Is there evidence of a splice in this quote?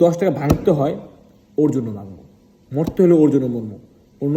no; 0 cuts

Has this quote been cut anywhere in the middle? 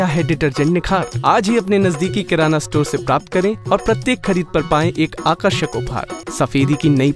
yes; 1 cut; at 6.2 s

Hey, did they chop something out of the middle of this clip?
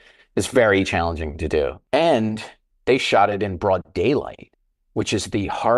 yes; 1 cut; at 1.8 s

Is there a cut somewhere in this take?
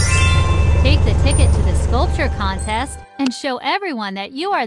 no; 0 cuts

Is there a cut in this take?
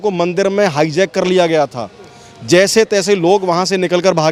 no; 0 cuts

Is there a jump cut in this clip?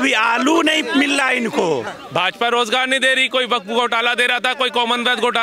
yes; 1 cut; at 1.8 s

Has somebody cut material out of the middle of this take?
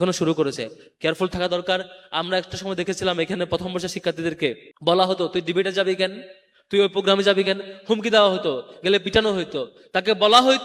yes; 1 cut; at 4.7 s

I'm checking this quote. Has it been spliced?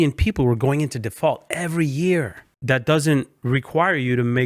yes; 2 cuts; at 2.4 s, 3.3 s

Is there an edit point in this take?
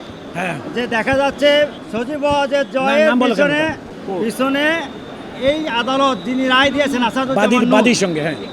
yes; 2 cuts; at 1.8 s, 3.9 s

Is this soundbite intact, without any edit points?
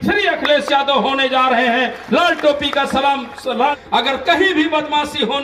no; 1 cut; at 3.8 s

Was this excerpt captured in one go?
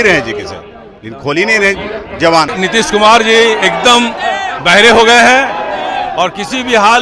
no; 1 cut; at 2.6 s

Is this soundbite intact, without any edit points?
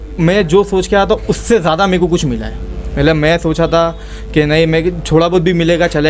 yes; 0 cuts

